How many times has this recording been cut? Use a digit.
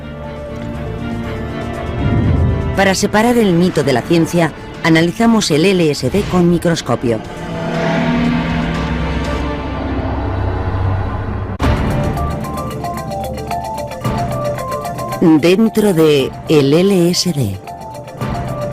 1